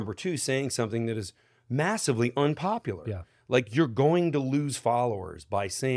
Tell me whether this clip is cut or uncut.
uncut